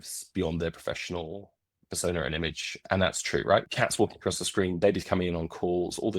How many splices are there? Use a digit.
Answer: 1